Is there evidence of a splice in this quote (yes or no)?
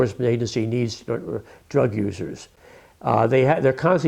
no